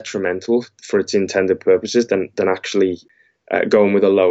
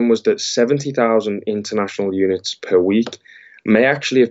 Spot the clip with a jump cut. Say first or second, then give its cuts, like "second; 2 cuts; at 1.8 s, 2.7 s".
first; 1 cut; at 3.1 s